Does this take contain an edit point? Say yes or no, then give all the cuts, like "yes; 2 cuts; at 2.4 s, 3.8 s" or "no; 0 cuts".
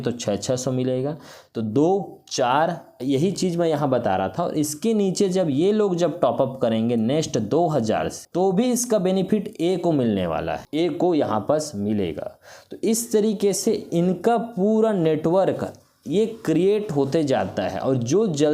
no; 0 cuts